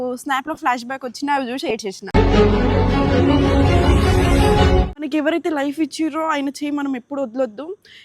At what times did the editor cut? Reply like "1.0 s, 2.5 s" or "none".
5.0 s

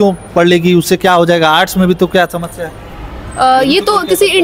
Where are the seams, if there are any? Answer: none

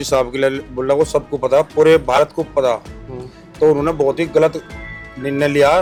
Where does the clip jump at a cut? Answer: none

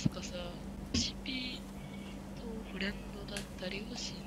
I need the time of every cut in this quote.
0.9 s

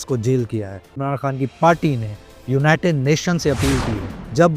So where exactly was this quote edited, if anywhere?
0.9 s

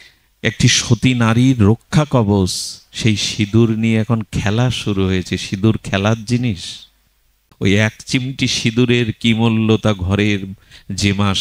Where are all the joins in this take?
7.4 s

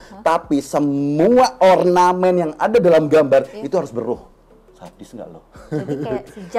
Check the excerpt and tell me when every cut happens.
5.5 s

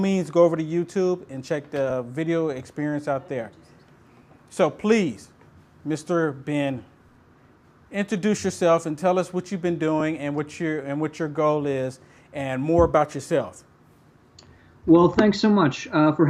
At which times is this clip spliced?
none

